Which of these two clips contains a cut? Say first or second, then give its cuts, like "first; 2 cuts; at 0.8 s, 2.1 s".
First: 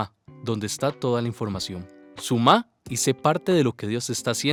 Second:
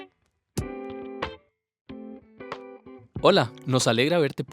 second; 1 cut; at 3.2 s